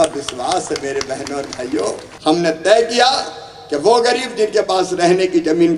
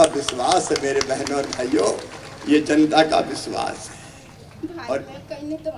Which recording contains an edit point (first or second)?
first